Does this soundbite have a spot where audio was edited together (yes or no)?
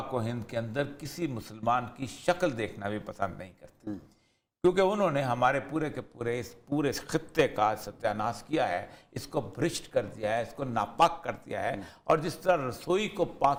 no